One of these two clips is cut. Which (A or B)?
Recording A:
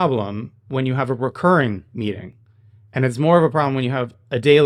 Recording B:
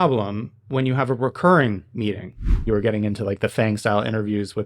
B